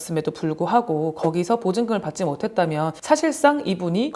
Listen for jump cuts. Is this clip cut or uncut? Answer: uncut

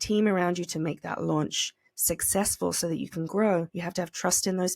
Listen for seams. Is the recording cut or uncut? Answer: cut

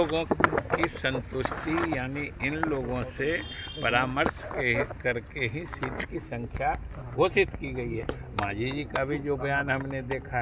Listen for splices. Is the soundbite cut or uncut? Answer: uncut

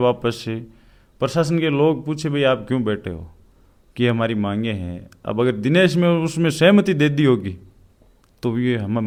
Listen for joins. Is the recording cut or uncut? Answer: uncut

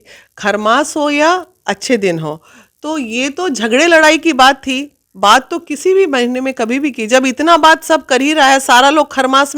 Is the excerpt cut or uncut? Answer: uncut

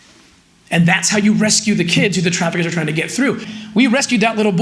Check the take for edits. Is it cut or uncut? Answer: cut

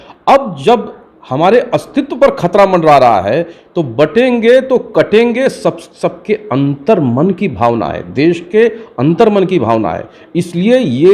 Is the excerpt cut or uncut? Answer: uncut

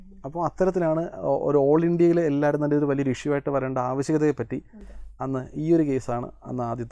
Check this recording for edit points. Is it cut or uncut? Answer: uncut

